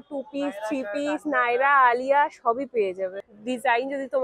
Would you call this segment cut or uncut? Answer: cut